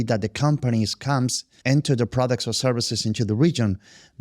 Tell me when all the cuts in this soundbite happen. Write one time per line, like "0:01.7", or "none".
0:01.5